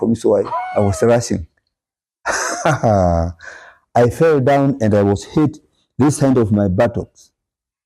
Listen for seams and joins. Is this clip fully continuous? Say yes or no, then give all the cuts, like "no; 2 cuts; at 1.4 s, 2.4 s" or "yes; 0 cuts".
yes; 0 cuts